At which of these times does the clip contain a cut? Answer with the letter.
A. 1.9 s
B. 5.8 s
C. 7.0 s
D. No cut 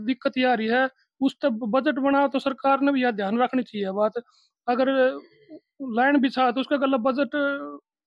D